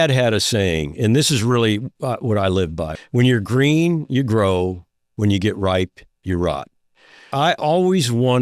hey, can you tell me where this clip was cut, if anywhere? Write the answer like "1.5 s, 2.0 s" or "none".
2.8 s, 7.3 s

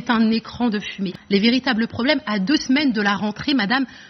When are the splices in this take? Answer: 1.1 s

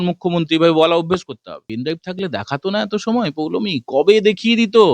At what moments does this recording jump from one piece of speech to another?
1.7 s

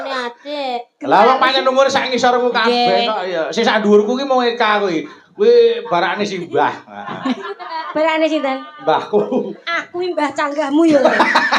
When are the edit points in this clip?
none

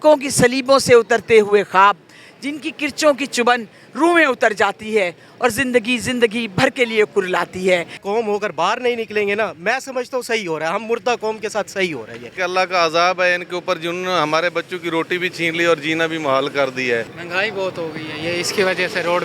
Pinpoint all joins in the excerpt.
7.9 s, 12.3 s, 17.2 s

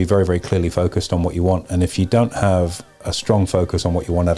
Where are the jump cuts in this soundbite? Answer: none

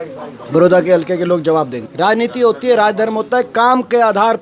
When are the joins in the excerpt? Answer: 1.8 s

